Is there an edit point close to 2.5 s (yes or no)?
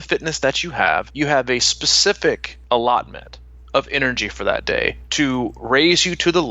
yes